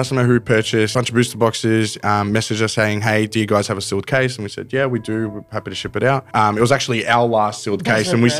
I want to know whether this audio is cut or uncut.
cut